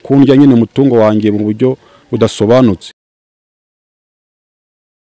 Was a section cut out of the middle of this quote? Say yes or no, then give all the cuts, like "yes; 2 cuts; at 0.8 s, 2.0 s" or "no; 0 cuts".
no; 0 cuts